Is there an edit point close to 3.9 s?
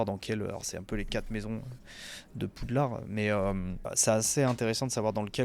yes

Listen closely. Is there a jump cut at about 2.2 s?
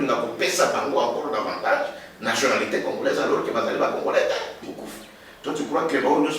no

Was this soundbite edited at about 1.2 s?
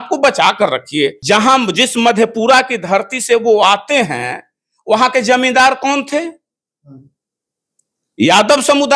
yes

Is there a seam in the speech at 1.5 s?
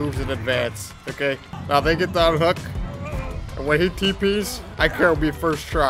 yes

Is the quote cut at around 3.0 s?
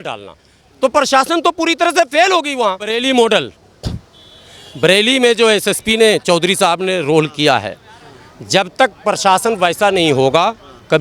yes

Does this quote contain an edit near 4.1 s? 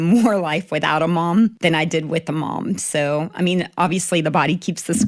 no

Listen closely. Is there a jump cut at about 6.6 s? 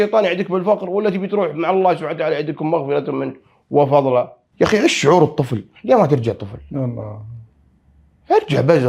no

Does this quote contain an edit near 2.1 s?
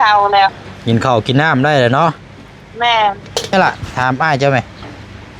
no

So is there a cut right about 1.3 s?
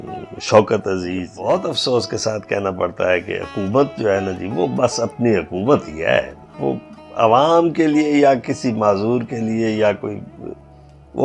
yes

